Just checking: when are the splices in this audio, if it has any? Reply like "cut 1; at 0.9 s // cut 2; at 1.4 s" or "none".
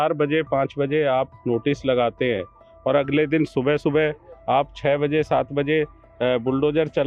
none